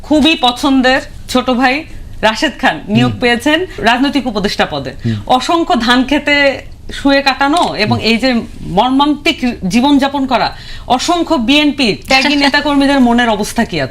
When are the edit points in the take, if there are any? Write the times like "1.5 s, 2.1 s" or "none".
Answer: 1.1 s, 3.8 s